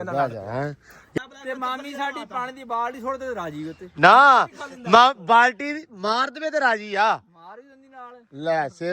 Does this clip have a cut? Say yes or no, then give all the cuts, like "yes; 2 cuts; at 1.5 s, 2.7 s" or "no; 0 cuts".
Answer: yes; 1 cut; at 1.2 s